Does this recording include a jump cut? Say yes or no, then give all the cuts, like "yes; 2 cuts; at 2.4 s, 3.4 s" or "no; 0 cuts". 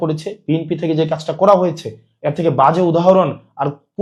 no; 0 cuts